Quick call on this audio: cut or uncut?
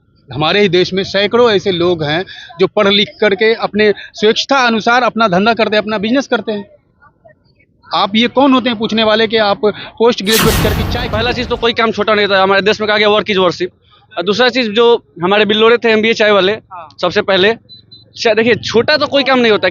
cut